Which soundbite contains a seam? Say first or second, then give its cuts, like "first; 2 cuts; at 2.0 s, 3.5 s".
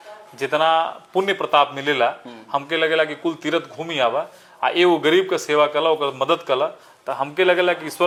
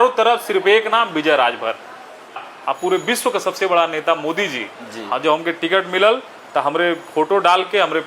second; 1 cut; at 2.5 s